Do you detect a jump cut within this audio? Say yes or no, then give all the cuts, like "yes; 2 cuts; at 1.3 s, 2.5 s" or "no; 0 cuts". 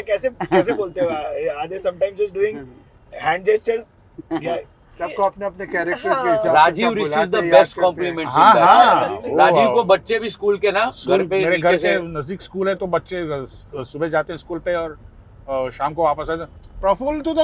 no; 0 cuts